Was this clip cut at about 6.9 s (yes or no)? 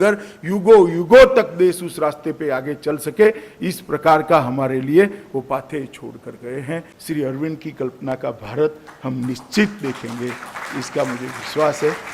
yes